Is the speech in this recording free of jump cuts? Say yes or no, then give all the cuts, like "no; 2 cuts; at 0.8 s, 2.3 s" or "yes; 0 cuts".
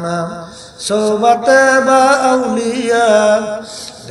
yes; 0 cuts